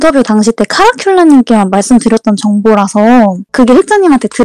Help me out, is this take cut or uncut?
cut